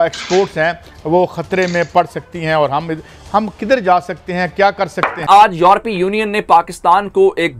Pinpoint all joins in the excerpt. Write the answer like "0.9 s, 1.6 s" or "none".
5.2 s

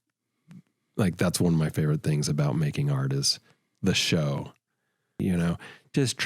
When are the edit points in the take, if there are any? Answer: 5.2 s

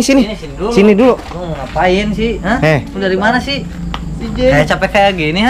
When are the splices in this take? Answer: none

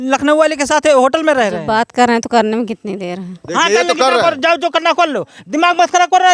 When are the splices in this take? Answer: 1.6 s

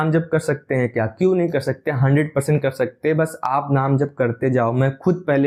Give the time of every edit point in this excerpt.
none

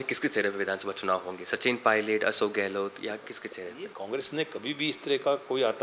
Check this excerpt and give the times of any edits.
3.9 s

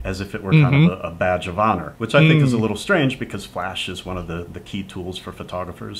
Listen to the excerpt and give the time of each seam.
1.9 s

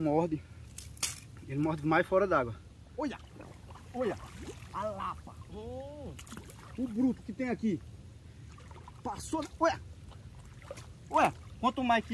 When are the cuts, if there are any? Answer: 2.7 s

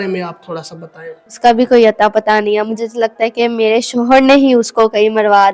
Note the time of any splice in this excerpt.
1.4 s

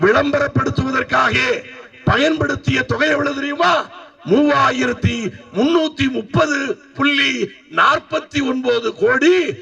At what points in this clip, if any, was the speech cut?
none

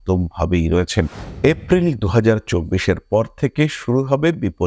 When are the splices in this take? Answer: 1.2 s

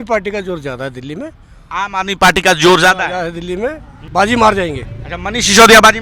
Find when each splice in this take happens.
4.0 s

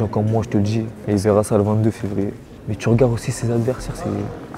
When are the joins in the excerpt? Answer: 1.0 s

